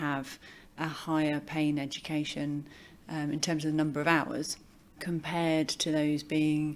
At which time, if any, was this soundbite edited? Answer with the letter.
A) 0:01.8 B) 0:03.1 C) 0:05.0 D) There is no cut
C